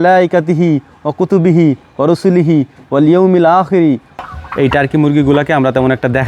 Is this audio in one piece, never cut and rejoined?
no; 1 cut; at 4.1 s

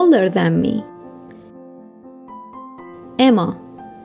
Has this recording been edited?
yes; 2 cuts; at 0.8 s, 3.1 s

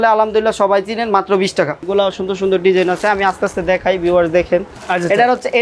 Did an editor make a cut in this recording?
yes; 2 cuts; at 1.8 s, 4.7 s

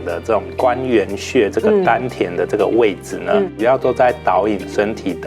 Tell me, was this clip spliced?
yes; 1 cut; at 3.6 s

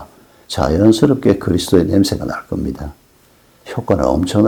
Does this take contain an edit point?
no; 0 cuts

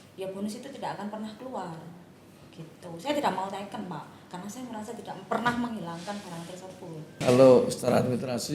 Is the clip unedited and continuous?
no; 1 cut; at 7.2 s

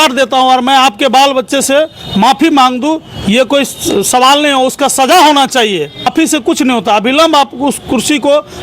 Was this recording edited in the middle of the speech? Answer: yes; 1 cut; at 6.1 s

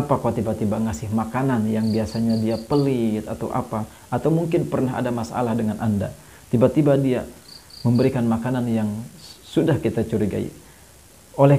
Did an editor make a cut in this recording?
no; 0 cuts

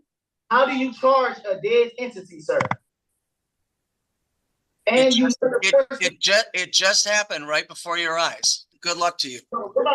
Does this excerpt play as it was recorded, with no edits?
no; 1 cut; at 8.7 s

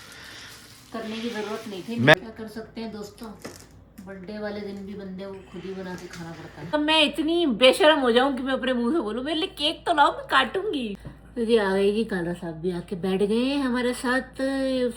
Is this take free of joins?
no; 3 cuts; at 2.1 s, 6.7 s, 11.0 s

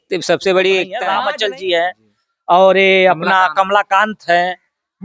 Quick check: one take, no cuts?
no; 1 cut; at 1.0 s

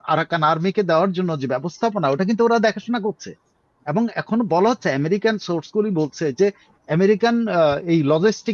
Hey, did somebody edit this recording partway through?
no; 0 cuts

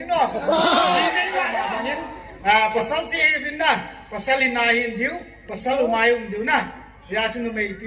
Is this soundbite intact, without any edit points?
no; 1 cut; at 1.8 s

